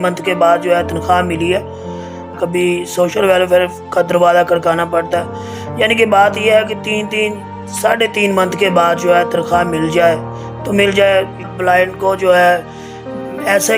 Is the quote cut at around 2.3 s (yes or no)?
yes